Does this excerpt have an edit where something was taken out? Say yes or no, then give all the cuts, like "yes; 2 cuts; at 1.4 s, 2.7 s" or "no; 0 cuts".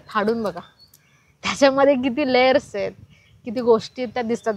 no; 0 cuts